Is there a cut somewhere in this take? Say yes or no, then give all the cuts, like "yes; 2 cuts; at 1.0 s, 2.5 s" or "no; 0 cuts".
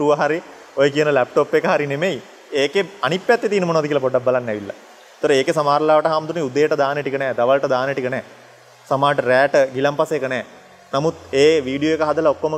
no; 0 cuts